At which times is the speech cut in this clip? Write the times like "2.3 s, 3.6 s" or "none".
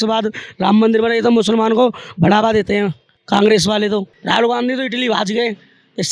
4.1 s